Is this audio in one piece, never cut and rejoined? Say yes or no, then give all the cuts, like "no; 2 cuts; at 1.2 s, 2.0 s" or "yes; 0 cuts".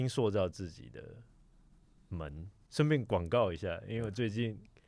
no; 1 cut; at 2.6 s